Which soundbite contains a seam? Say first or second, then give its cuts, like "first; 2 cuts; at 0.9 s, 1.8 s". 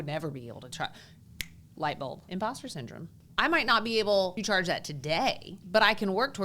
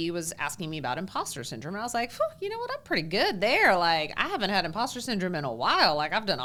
first; 4 cuts; at 2.2 s, 3.2 s, 4.4 s, 5.6 s